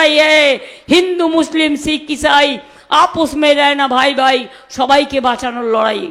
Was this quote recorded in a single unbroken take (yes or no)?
yes